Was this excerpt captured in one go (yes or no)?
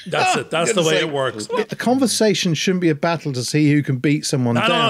no